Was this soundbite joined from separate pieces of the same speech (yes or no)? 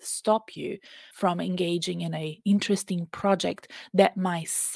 no